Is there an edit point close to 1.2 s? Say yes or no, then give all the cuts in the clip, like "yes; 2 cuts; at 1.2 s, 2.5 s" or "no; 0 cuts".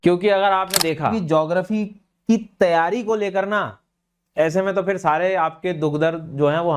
yes; 1 cut; at 1.2 s